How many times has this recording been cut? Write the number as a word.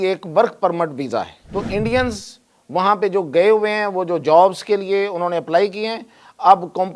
one